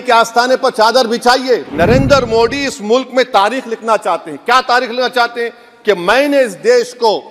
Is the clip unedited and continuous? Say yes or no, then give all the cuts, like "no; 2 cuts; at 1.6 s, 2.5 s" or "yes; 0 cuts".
no; 1 cut; at 1.7 s